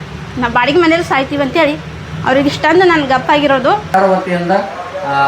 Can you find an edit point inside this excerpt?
yes; 1 cut; at 3.9 s

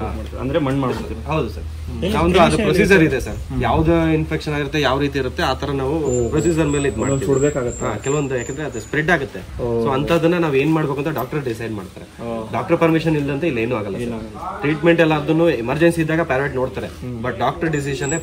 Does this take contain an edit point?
no; 0 cuts

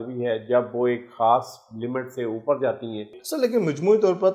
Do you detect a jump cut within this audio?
yes; 1 cut; at 3.1 s

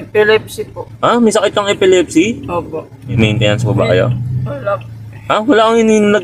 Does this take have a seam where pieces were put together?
yes; 1 cut; at 3.0 s

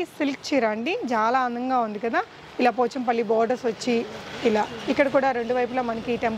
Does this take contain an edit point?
no; 0 cuts

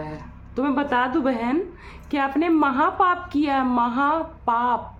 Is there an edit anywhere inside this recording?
no; 0 cuts

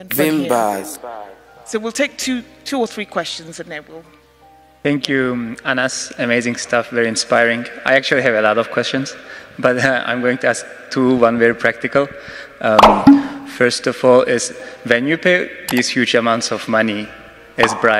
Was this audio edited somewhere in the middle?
yes; 3 cuts; at 0.9 s, 12.8 s, 13.4 s

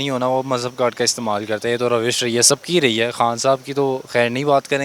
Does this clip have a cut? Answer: no; 0 cuts

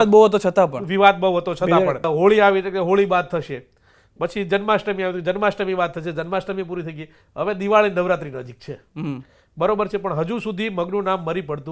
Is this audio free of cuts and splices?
no; 1 cut; at 2.0 s

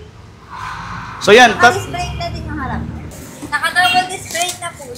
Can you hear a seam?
yes; 1 cut; at 3.0 s

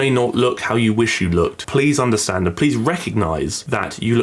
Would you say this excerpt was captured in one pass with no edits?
yes; 0 cuts

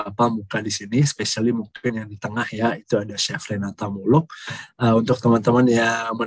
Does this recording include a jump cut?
no; 0 cuts

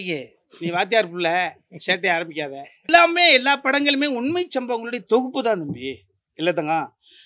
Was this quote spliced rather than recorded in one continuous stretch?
yes; 1 cut; at 2.9 s

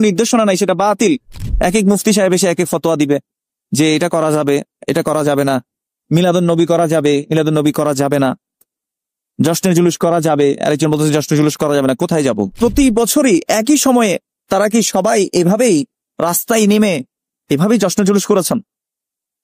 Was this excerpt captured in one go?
no; 2 cuts; at 1.3 s, 12.5 s

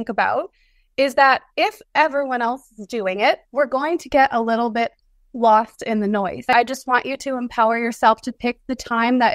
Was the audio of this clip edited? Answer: yes; 1 cut; at 6.5 s

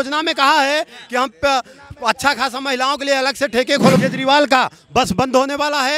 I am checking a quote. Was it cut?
yes; 1 cut; at 4.0 s

